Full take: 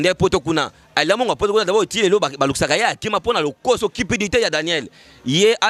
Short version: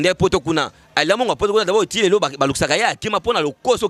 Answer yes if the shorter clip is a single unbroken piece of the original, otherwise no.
yes